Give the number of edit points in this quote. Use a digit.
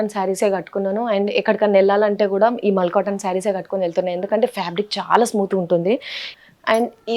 1